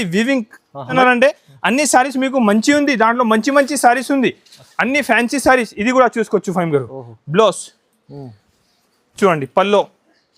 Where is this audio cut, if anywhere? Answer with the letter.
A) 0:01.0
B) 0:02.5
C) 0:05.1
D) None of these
A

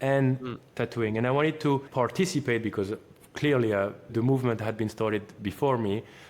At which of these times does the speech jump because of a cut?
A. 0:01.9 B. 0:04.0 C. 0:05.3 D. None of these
A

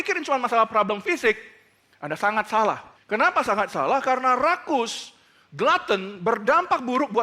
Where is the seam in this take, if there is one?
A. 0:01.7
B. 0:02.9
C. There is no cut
B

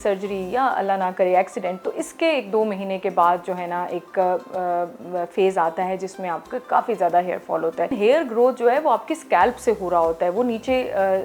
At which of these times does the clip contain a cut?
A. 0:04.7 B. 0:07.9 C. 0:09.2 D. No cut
B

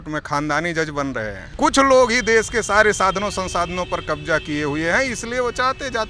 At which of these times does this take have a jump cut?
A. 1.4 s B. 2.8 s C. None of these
A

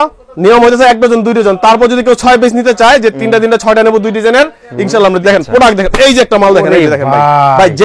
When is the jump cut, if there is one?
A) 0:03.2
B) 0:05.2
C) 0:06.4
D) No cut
B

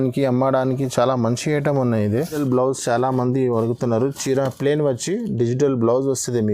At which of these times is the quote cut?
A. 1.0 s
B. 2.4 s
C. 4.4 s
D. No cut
B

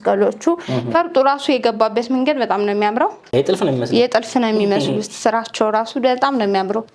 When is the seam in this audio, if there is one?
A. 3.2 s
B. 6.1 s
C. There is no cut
A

